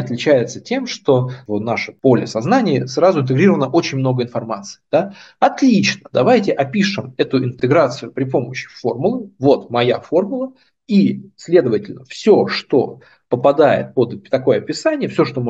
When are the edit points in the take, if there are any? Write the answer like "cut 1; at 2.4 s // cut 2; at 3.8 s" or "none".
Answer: cut 1; at 1.4 s